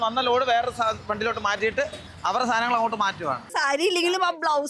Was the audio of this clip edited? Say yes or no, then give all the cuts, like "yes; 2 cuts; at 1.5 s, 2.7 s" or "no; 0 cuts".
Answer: yes; 1 cut; at 3.4 s